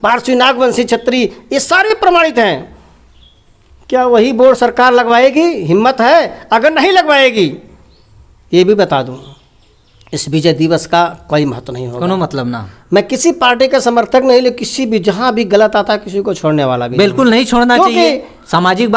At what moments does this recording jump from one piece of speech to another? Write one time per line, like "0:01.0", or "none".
0:12.7

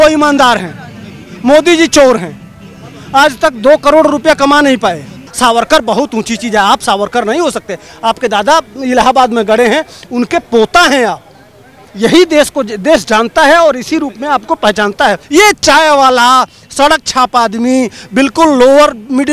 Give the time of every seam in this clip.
0:05.2
0:15.2

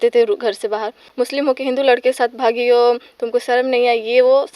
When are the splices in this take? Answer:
0:01.0

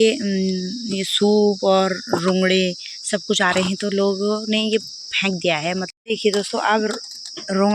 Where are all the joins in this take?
0:06.1

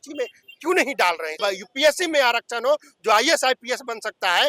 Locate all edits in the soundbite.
0:01.4

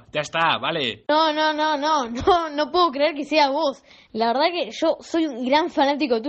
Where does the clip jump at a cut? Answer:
0:01.0

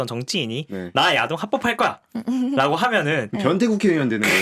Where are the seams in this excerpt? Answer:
none

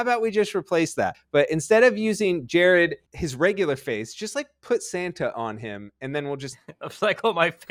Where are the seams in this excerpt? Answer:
none

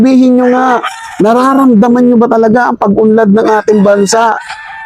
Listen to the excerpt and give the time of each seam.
none

